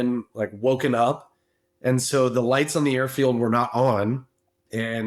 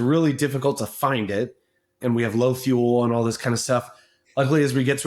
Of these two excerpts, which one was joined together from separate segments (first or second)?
second